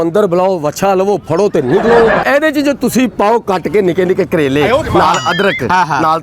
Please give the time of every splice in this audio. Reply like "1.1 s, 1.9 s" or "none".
2.2 s